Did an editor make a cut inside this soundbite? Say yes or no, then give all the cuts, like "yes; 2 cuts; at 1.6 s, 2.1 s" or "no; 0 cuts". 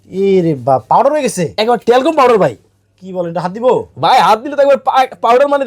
no; 0 cuts